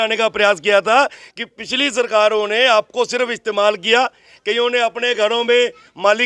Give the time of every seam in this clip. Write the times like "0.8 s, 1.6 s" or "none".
none